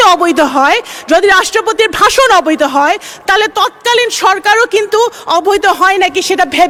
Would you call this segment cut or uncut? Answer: uncut